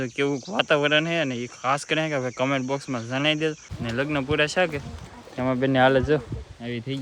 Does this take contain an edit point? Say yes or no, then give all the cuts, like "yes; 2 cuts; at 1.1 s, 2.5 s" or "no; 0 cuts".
yes; 1 cut; at 3.7 s